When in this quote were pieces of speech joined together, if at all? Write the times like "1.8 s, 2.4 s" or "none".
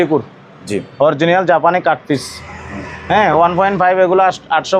none

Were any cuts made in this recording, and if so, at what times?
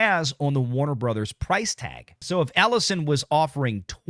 2.2 s

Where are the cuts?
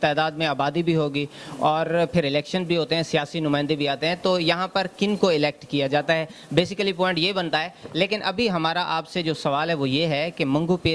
none

